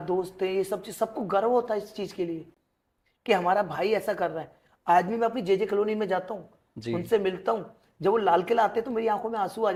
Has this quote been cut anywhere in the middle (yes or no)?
no